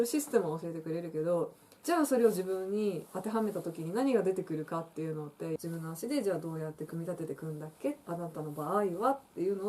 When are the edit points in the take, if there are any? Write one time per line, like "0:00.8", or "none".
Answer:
0:05.6
0:08.0